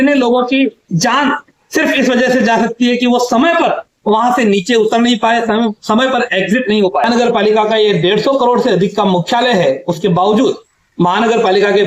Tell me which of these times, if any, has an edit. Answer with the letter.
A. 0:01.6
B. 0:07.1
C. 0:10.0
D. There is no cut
B